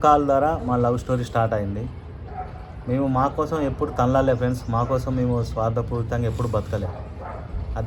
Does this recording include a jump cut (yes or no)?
no